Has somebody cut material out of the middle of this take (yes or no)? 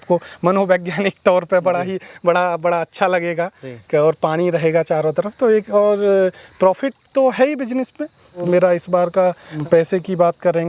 yes